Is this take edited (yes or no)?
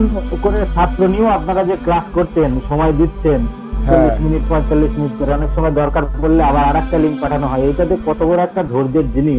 no